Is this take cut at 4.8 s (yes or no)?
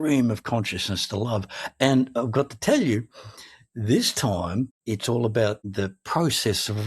yes